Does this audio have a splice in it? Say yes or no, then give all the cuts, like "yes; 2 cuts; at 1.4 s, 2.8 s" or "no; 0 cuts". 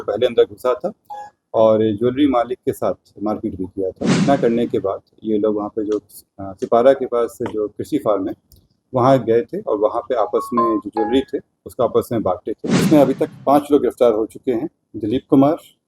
yes; 2 cuts; at 4.1 s, 12.8 s